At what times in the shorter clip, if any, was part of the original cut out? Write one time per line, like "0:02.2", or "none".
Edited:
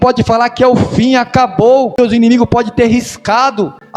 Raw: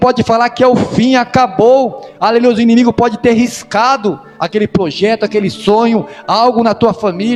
0:02.0